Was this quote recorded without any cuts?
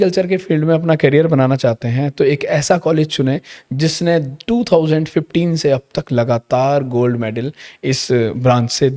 yes; 0 cuts

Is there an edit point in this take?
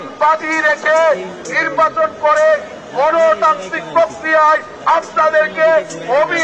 no; 0 cuts

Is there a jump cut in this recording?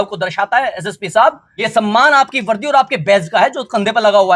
yes; 1 cut; at 1.5 s

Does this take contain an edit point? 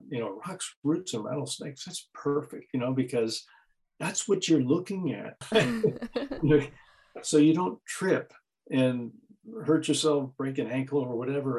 yes; 1 cut; at 5.4 s

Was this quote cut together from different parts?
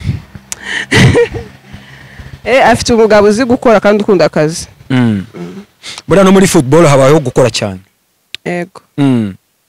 no; 0 cuts

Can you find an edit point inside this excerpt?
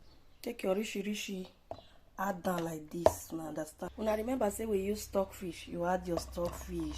yes; 1 cut; at 3.8 s

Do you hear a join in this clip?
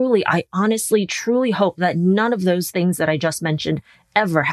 no; 0 cuts

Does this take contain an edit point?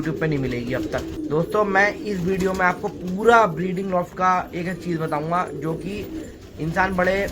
yes; 1 cut; at 1.1 s

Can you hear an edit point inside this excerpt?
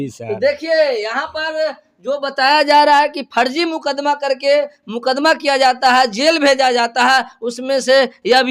no; 0 cuts

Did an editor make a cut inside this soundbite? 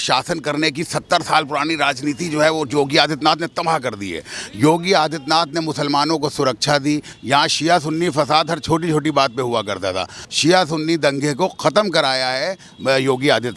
yes; 2 cuts; at 7.1 s, 10.2 s

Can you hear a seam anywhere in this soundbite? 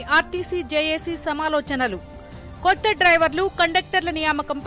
no; 0 cuts

